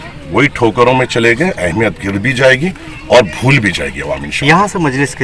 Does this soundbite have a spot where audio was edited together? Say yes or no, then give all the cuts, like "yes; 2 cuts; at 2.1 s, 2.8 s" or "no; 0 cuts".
no; 0 cuts